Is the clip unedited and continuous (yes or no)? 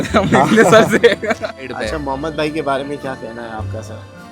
no